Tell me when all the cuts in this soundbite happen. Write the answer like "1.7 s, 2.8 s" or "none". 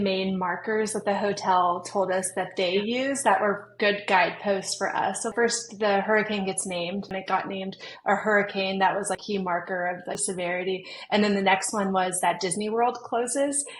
5.3 s, 7.1 s, 9.2 s, 10.2 s